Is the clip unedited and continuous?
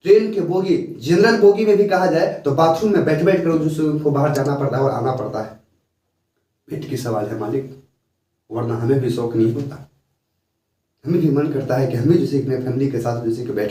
yes; 0 cuts

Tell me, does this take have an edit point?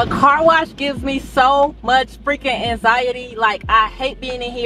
no; 0 cuts

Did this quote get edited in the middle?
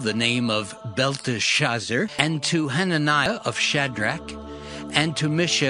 yes; 2 cuts; at 2.1 s, 3.3 s

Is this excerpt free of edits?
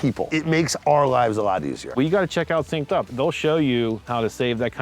no; 2 cuts; at 1.9 s, 3.1 s

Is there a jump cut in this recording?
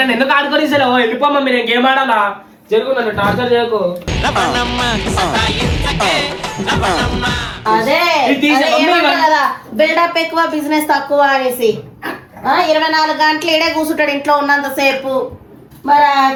no; 0 cuts

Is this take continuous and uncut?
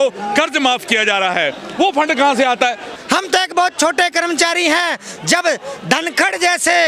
no; 1 cut; at 3.0 s

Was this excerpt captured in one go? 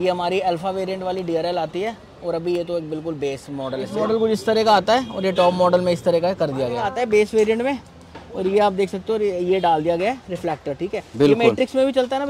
no; 2 cuts; at 3.9 s, 6.9 s

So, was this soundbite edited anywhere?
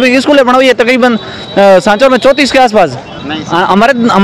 yes; 1 cut; at 3.3 s

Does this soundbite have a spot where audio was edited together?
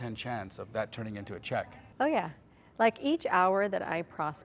yes; 1 cut; at 1.8 s

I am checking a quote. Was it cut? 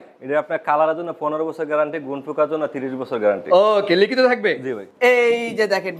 yes; 1 cut; at 4.8 s

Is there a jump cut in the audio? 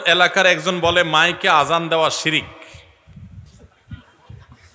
no; 0 cuts

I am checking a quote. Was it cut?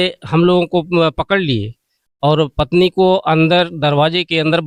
no; 0 cuts

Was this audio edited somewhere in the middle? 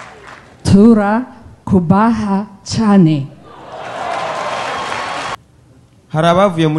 yes; 1 cut; at 5.4 s

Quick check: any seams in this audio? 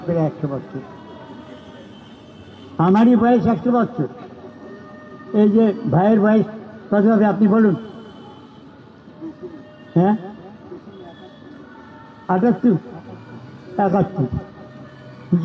no; 0 cuts

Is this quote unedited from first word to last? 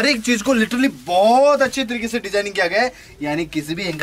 yes; 0 cuts

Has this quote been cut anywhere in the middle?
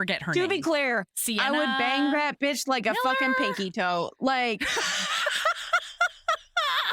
no; 0 cuts

